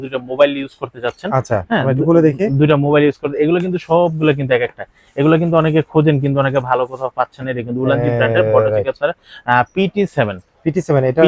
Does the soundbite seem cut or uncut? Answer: uncut